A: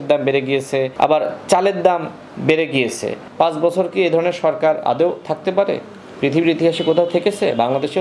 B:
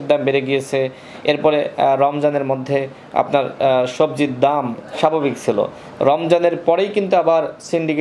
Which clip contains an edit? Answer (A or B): A